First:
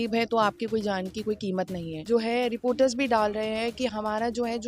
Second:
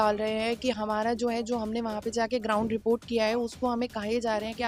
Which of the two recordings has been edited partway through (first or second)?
first